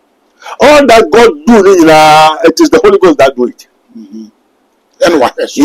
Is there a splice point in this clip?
no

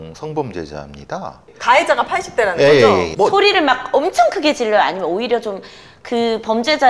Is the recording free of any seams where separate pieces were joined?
no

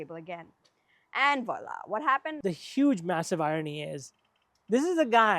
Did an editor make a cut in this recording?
yes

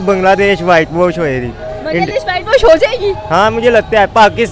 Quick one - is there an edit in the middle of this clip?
no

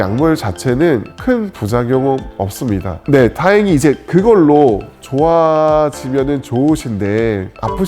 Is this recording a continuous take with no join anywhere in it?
no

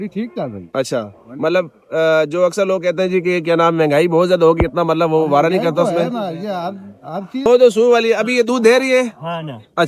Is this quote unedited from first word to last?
no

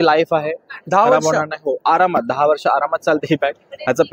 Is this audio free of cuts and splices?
yes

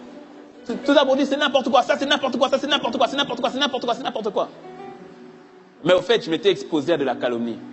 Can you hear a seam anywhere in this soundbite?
no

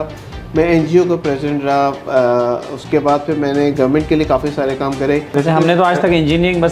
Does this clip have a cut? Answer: yes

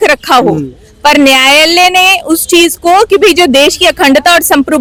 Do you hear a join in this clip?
no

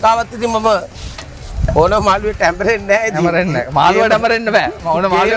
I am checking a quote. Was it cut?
no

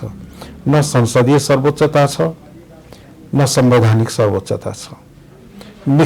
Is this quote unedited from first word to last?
yes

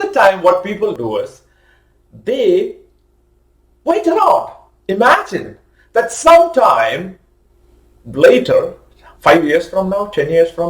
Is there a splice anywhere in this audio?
yes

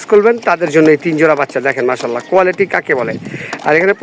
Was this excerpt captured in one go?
yes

